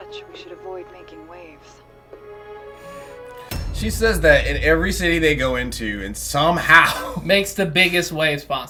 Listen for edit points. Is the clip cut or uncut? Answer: uncut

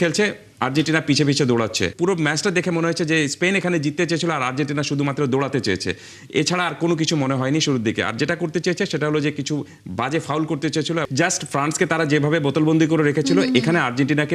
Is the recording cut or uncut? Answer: cut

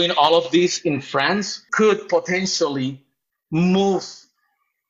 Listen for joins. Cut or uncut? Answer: cut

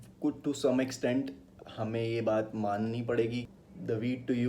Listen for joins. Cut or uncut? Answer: cut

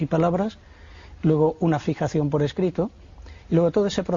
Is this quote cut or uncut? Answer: cut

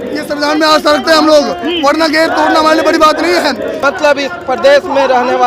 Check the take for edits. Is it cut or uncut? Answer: cut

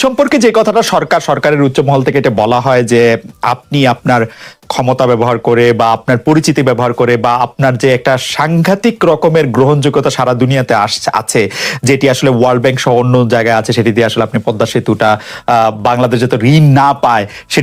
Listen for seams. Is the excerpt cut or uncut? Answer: uncut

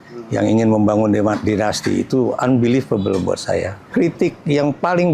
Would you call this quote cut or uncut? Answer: cut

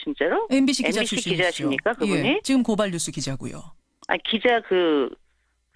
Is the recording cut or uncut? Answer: uncut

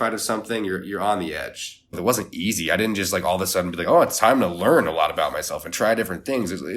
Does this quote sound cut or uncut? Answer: cut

